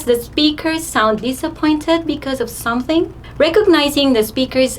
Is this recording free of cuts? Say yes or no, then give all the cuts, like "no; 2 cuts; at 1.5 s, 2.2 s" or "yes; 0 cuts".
no; 1 cut; at 3.2 s